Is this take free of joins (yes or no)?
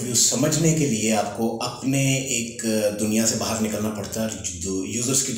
yes